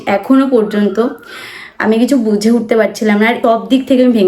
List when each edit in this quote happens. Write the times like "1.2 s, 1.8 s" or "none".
3.4 s